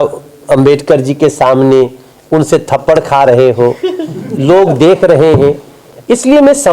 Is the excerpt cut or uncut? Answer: uncut